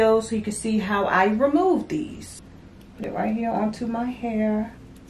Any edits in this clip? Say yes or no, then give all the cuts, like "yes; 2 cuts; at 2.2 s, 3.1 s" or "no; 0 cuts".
yes; 1 cut; at 2.5 s